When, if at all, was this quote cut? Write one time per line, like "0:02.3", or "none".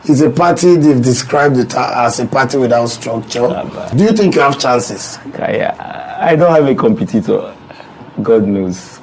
0:03.9